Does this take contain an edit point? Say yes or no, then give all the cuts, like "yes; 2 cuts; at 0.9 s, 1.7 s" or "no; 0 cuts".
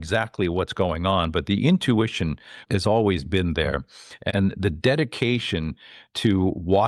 yes; 2 cuts; at 2.6 s, 4.3 s